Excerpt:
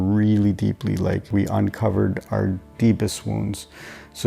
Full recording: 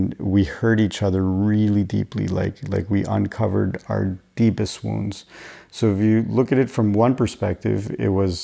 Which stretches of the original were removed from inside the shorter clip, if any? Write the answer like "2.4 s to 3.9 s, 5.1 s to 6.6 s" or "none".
2.6 s to 2.9 s